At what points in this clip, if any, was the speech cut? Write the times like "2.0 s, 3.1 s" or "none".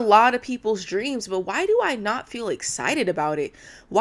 none